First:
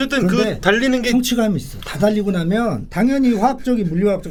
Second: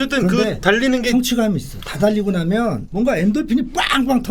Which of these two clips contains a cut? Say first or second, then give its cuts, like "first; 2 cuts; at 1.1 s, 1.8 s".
second; 1 cut; at 2.9 s